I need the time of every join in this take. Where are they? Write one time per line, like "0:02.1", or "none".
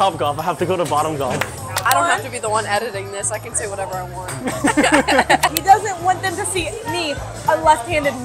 0:01.9
0:05.5